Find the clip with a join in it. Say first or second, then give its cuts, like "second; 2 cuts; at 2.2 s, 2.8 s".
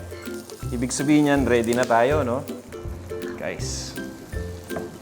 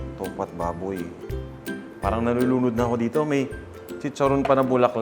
second; 1 cut; at 1.2 s